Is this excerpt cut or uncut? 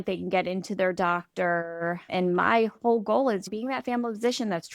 cut